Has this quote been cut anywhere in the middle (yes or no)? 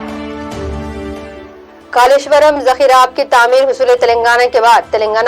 no